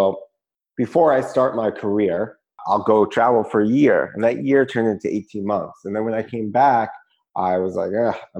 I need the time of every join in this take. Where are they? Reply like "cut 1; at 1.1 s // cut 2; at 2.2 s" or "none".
cut 1; at 2.6 s